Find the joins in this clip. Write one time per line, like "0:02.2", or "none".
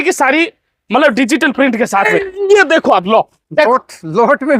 0:02.1

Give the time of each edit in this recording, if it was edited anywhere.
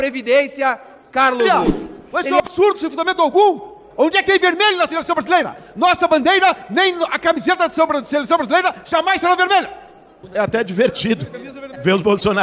0:01.5

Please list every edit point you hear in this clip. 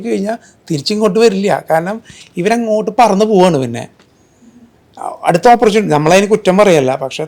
none

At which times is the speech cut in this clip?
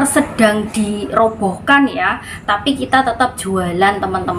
none

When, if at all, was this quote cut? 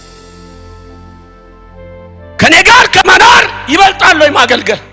0:02.4

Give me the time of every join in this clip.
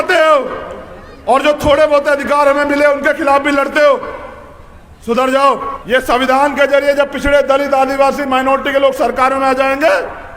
0:05.7

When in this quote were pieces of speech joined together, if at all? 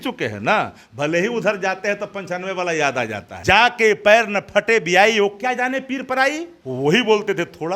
0:03.3
0:06.6

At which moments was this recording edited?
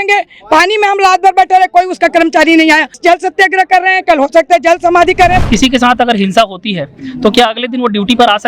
0:03.0
0:05.4

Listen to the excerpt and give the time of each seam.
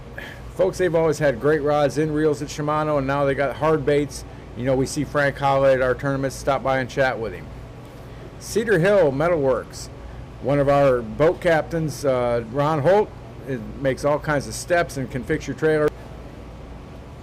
0:15.9

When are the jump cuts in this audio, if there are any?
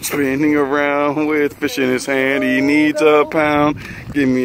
none

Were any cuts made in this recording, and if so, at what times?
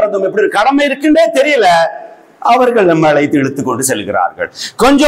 none

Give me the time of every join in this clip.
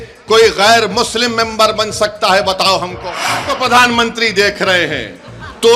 0:03.5

